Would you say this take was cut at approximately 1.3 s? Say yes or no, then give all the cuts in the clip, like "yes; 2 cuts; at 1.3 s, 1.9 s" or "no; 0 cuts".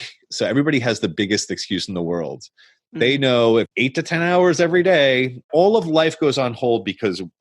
no; 2 cuts; at 3.7 s, 5.5 s